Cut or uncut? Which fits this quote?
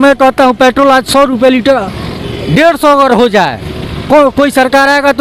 uncut